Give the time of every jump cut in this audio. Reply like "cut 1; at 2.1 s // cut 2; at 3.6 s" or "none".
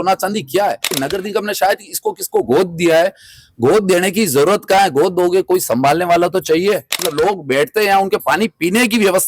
cut 1; at 1.0 s // cut 2; at 7.0 s